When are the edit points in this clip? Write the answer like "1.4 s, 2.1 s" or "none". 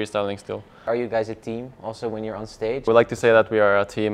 0.8 s, 2.9 s